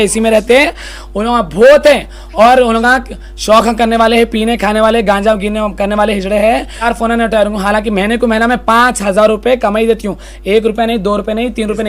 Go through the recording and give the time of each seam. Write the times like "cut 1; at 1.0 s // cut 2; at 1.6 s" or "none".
cut 1; at 6.9 s